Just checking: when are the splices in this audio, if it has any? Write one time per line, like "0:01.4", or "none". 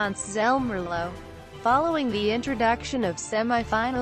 none